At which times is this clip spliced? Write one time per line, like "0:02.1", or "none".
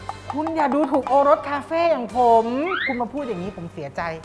0:02.9